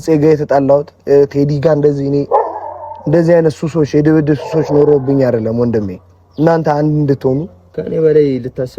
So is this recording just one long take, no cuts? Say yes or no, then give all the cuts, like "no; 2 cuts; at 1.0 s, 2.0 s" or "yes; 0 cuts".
no; 1 cut; at 7.6 s